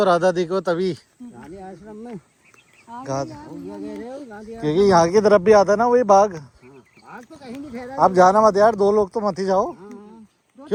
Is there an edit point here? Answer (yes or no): no